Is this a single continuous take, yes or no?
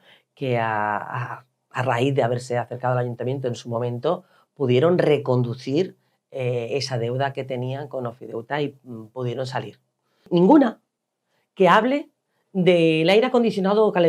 no